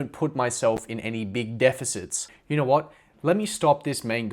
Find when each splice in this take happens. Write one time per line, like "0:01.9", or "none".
0:02.3